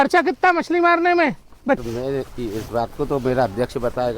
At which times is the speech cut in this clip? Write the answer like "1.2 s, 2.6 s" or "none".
1.8 s